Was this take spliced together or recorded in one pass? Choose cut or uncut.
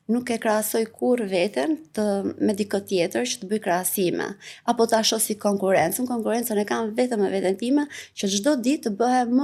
uncut